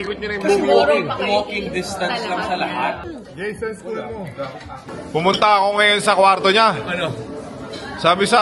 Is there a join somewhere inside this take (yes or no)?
yes